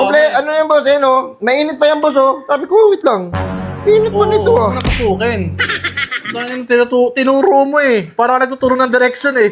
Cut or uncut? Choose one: uncut